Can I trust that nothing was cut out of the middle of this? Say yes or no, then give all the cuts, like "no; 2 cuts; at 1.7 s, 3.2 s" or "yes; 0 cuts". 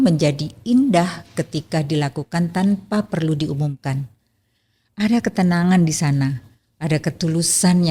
yes; 0 cuts